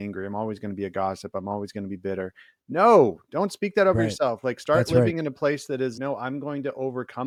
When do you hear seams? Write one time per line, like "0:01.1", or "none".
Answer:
none